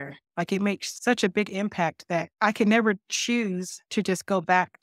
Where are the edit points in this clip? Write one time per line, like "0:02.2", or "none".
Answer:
0:00.9
0:02.3
0:03.7